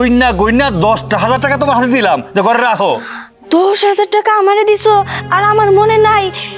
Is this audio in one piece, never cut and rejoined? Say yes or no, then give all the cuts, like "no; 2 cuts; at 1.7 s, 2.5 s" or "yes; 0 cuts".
yes; 0 cuts